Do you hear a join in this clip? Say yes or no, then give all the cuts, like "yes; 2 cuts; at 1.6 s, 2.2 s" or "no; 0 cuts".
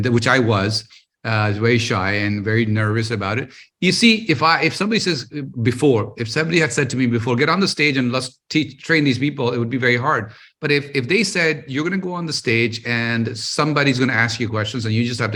no; 0 cuts